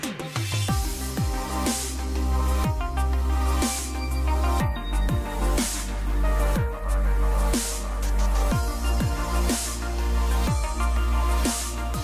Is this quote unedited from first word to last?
yes; 0 cuts

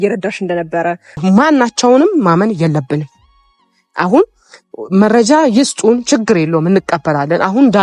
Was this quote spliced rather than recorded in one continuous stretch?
yes; 1 cut; at 1.1 s

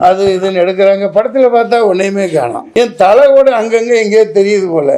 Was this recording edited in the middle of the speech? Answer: yes; 1 cut; at 2.6 s

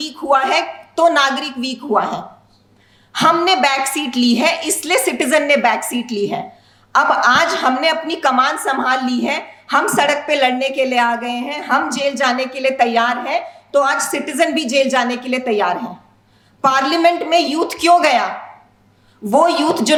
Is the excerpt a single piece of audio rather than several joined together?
yes; 0 cuts

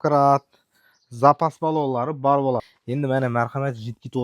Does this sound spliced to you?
yes; 1 cut; at 2.6 s

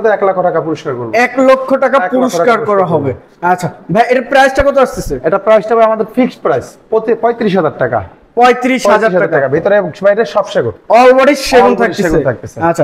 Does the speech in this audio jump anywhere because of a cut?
no; 0 cuts

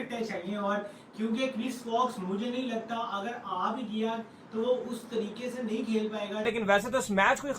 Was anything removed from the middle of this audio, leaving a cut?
yes; 1 cut; at 6.5 s

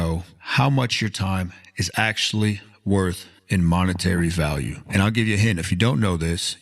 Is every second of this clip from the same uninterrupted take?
no; 1 cut; at 3.3 s

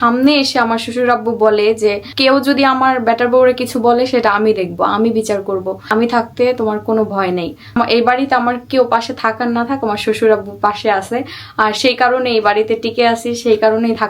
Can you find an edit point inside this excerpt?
yes; 3 cuts; at 2.1 s, 5.8 s, 7.8 s

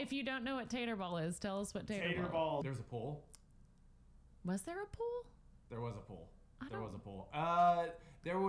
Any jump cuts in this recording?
yes; 1 cut; at 2.6 s

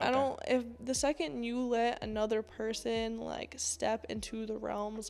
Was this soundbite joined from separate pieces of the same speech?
no; 0 cuts

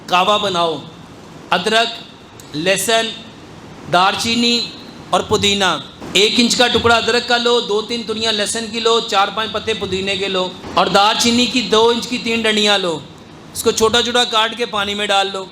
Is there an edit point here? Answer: yes; 2 cuts; at 5.9 s, 10.6 s

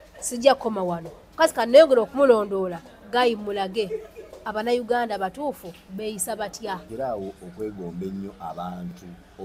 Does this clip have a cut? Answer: yes; 1 cut; at 6.9 s

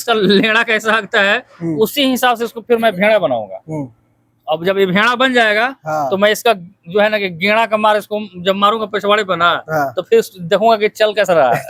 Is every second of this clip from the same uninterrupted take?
yes; 0 cuts

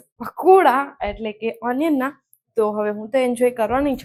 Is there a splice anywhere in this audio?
no; 0 cuts

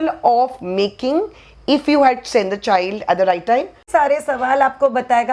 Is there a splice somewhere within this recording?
yes; 1 cut; at 3.9 s

